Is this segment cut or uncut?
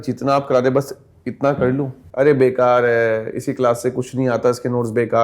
cut